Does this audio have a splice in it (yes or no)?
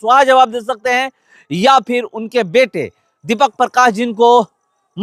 no